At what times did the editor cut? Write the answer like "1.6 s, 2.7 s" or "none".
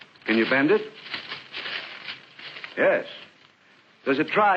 2.2 s